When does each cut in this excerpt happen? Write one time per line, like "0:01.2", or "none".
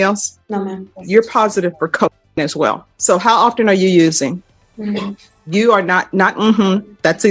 0:01.0
0:02.9
0:04.5